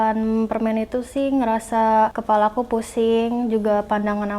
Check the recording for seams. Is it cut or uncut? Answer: cut